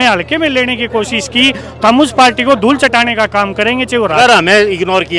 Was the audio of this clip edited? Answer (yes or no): yes